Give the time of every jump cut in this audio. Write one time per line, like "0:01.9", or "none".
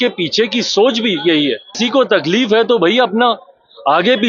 0:01.8